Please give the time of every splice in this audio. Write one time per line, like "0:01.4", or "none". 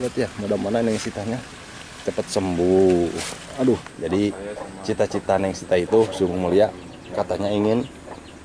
0:03.9